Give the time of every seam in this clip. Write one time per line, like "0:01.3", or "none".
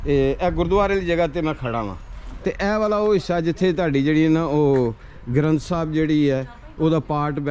0:02.3

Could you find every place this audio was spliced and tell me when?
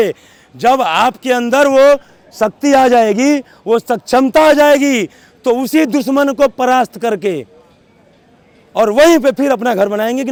none

